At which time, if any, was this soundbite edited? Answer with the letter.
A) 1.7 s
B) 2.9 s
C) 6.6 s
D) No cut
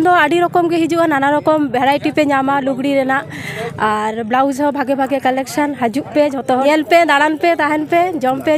C